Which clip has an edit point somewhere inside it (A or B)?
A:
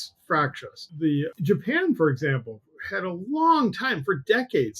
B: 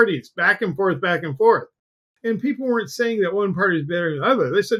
A